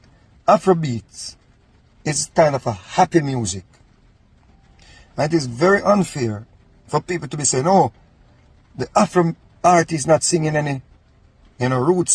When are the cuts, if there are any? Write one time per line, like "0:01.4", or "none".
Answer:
none